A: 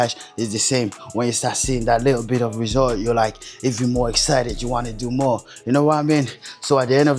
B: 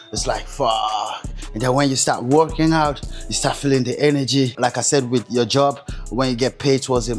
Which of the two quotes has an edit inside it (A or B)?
B